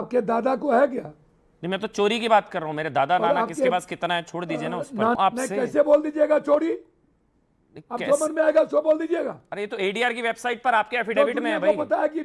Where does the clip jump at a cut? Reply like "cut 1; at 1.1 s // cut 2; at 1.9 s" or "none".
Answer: cut 1; at 5.2 s

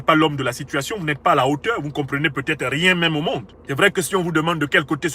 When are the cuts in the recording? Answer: cut 1; at 3.5 s

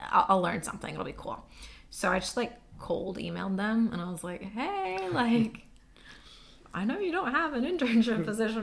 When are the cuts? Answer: none

